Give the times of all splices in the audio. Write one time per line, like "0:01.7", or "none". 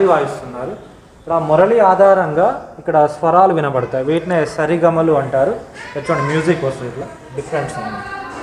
none